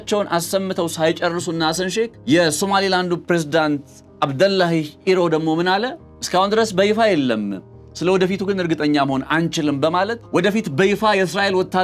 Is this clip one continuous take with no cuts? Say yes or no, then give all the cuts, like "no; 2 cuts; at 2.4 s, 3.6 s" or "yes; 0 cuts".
no; 3 cuts; at 2.2 s, 6.2 s, 10.2 s